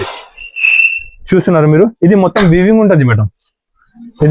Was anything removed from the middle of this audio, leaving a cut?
no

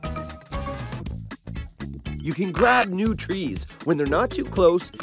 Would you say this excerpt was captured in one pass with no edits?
no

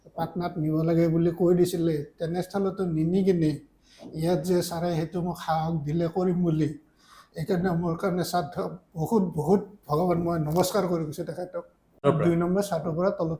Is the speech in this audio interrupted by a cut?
yes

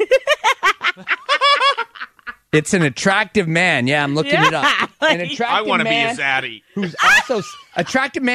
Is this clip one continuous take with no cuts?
yes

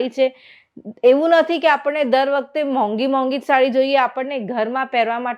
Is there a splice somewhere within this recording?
no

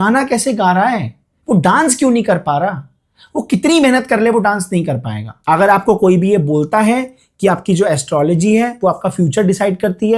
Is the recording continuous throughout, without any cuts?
no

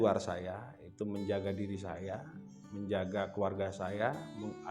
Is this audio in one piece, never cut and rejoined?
yes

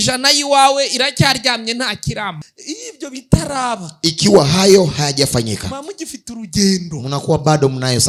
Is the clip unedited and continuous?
no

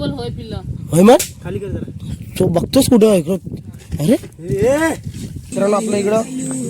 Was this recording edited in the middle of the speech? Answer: yes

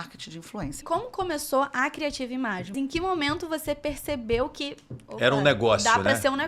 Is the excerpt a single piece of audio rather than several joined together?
no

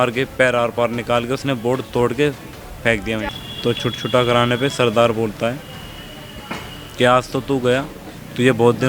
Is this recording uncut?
no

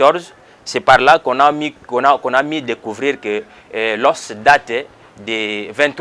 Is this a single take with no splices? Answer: yes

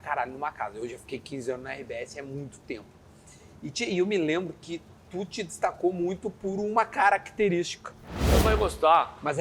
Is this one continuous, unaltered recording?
no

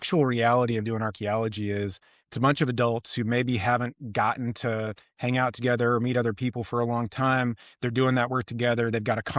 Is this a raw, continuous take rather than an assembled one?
yes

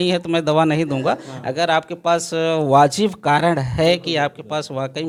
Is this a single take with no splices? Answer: yes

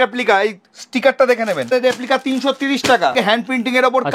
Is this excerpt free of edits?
no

